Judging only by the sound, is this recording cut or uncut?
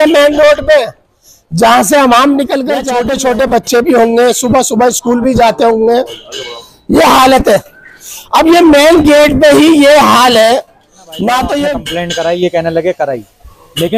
cut